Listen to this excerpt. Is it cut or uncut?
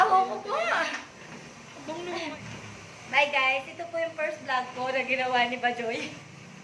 cut